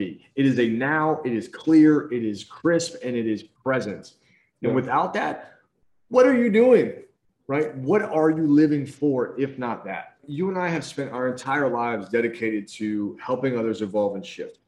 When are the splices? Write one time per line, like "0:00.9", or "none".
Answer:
0:10.2

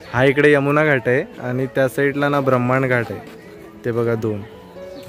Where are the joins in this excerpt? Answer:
none

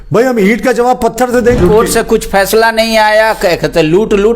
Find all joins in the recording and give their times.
0:01.6

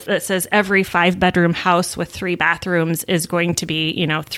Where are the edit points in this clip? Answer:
none

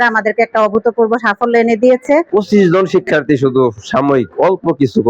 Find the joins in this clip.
0:02.3

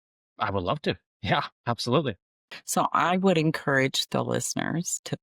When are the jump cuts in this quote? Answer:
0:02.5

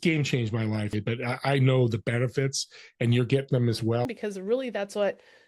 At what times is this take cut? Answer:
0:00.9
0:04.1

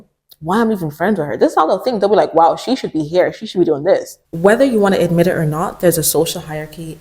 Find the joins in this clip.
0:04.2

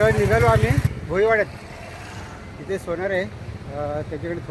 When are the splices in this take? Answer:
0:00.9

